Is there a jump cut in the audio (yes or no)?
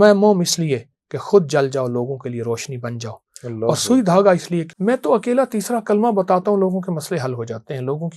yes